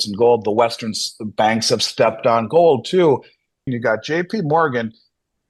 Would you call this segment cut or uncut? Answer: cut